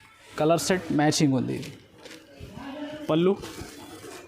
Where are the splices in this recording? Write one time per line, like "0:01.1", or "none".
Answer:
0:03.1